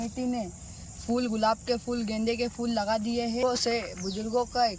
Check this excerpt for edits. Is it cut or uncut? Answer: cut